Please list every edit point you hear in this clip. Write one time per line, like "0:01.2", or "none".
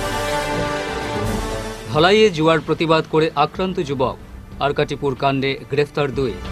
0:01.5